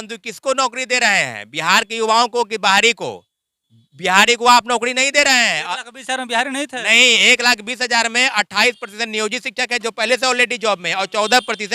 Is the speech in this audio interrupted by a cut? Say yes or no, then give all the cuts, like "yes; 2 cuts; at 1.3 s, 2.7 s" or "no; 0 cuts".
no; 0 cuts